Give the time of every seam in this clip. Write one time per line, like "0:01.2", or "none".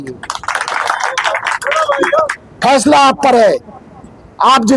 0:02.4